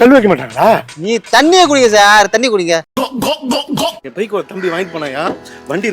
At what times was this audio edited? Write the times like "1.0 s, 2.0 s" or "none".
0.9 s